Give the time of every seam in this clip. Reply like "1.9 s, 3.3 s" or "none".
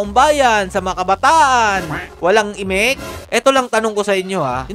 3.1 s